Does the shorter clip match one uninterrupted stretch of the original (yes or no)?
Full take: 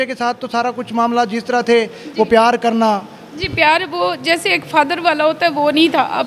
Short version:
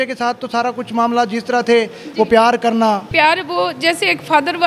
no